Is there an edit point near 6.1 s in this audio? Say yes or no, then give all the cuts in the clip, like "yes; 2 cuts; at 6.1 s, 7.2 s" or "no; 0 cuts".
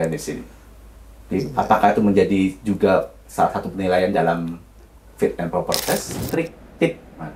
yes; 1 cut; at 6.1 s